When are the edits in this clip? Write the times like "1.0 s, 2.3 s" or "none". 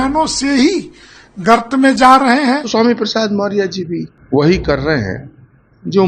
2.7 s, 4.1 s